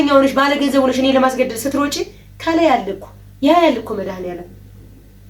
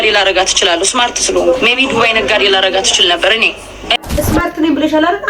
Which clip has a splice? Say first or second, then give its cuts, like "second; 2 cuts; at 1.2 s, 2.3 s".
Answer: second; 1 cut; at 4.0 s